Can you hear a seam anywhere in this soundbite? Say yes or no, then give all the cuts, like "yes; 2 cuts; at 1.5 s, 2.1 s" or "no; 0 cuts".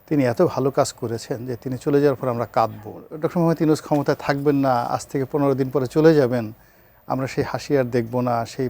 yes; 1 cut; at 3.0 s